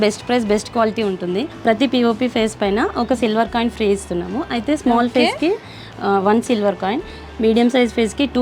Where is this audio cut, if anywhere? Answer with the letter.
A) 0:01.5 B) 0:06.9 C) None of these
A